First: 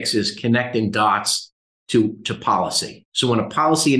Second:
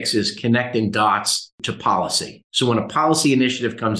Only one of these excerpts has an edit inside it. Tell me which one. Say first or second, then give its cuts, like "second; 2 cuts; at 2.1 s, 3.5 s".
second; 1 cut; at 1.7 s